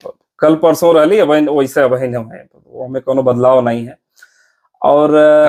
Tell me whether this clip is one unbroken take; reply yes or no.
yes